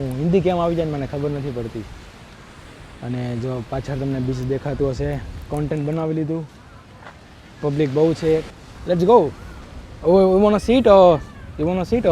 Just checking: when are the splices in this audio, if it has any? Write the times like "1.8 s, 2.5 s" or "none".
8.5 s